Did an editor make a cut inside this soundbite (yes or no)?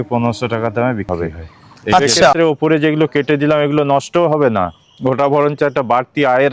yes